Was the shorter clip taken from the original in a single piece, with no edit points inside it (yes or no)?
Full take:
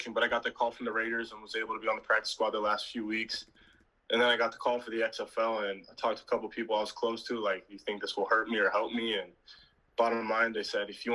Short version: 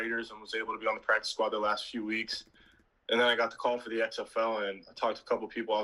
yes